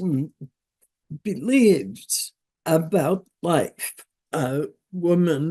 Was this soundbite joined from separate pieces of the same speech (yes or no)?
yes